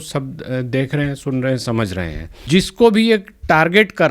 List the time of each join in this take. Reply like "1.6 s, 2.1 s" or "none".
2.4 s

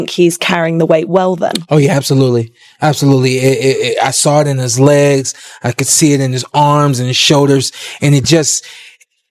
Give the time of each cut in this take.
none

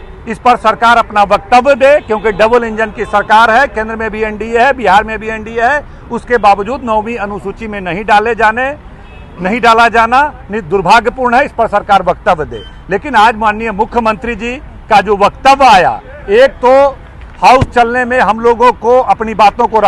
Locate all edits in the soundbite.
none

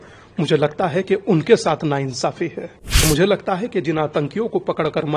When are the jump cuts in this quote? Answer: 3.0 s

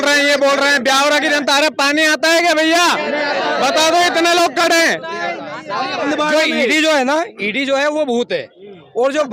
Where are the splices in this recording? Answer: 6.1 s

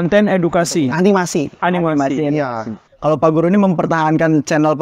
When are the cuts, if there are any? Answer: 2.9 s

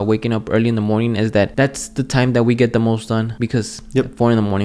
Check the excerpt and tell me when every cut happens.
1.5 s, 3.3 s

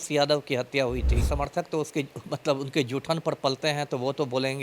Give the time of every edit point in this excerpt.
1.2 s

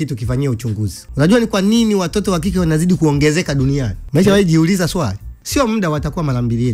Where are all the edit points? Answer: 1.0 s, 4.0 s, 5.4 s

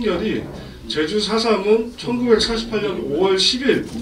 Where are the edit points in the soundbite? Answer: none

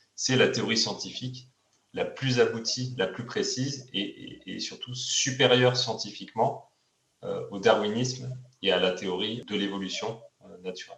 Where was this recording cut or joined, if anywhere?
9.4 s

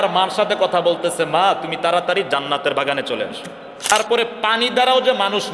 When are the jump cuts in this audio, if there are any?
3.9 s

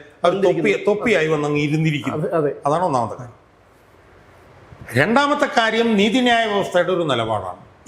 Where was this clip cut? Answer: none

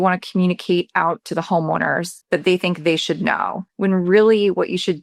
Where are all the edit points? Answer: 2.1 s, 3.6 s

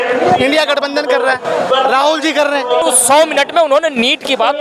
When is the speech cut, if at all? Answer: 2.8 s

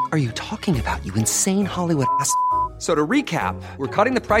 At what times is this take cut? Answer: none

